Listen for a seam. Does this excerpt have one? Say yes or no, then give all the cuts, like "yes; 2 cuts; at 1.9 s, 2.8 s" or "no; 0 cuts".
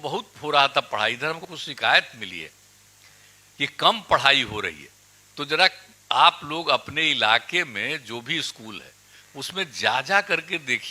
yes; 1 cut; at 1.6 s